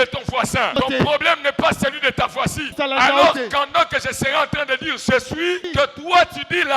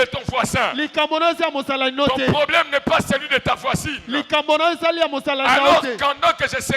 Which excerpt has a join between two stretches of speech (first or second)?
first